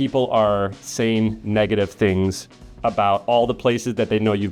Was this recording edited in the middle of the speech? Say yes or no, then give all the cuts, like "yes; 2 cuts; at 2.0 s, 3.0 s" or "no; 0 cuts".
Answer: no; 0 cuts